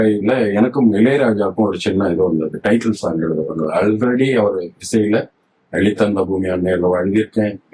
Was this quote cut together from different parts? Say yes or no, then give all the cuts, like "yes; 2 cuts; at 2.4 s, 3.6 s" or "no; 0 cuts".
no; 0 cuts